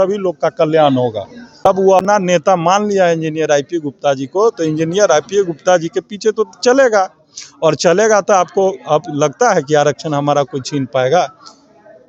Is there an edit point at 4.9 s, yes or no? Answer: no